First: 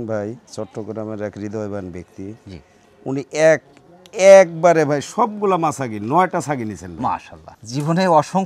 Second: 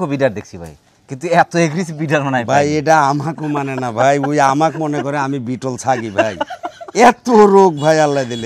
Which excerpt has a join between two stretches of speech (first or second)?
first